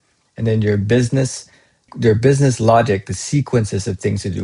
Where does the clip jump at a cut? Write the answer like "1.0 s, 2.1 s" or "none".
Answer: 1.9 s